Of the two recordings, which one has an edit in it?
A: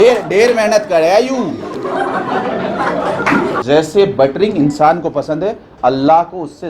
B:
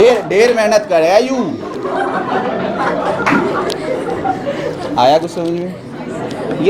A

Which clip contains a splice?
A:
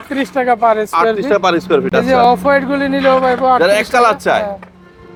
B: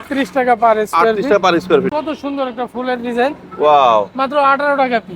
B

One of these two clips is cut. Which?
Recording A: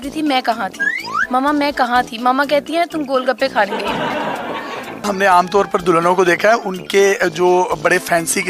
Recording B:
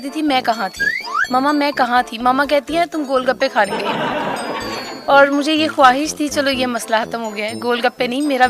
A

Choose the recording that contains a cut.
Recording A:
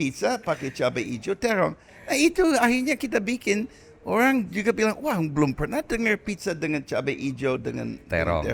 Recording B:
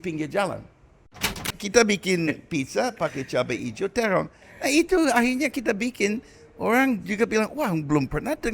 B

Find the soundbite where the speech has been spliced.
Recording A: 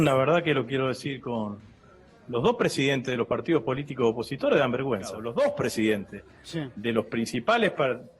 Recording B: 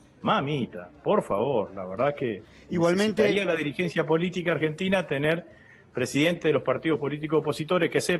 A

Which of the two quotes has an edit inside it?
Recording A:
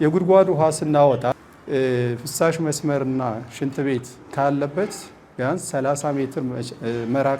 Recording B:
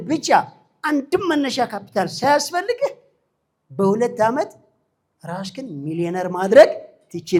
A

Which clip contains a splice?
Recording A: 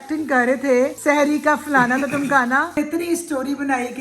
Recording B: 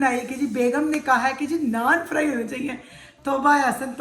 A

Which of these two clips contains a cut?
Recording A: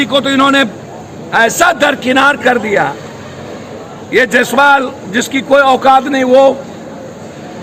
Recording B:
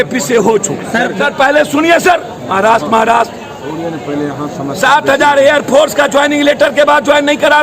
B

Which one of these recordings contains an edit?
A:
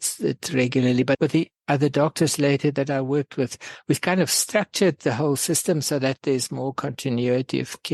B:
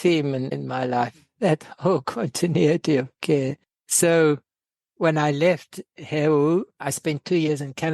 B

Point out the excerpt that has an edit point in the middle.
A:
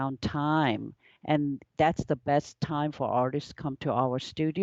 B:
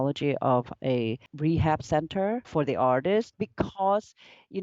B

